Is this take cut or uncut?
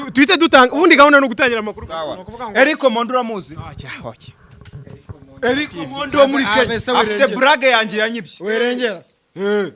uncut